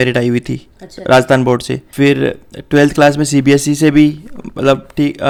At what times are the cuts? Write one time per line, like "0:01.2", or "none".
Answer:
none

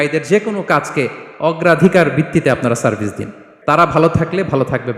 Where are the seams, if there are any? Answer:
0:03.8

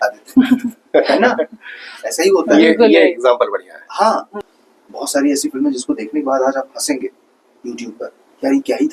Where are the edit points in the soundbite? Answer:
0:04.4

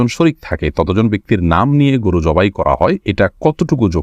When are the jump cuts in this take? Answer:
0:03.0

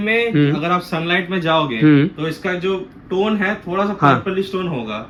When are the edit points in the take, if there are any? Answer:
none

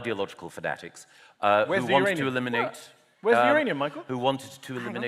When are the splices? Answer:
none

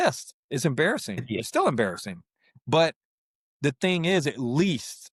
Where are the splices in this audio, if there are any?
none

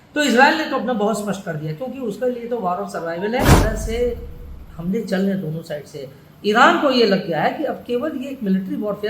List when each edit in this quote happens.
0:03.6

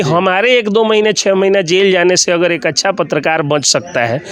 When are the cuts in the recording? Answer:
none

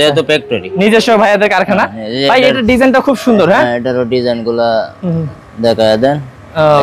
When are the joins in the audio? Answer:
none

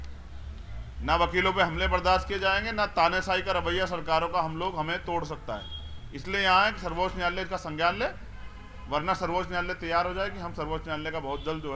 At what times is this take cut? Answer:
none

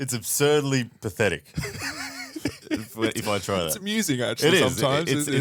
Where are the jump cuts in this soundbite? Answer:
none

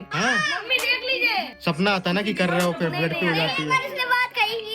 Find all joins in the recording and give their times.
0:01.5

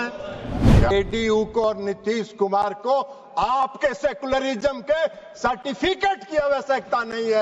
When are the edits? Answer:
0:00.9

